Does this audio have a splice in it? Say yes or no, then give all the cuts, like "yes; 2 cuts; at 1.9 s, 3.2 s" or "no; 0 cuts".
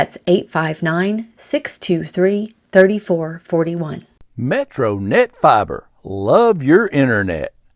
yes; 1 cut; at 4.2 s